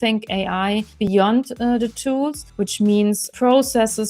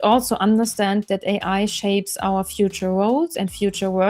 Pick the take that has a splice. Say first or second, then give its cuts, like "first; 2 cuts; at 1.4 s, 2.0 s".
first; 3 cuts; at 0.9 s, 2.4 s, 3.3 s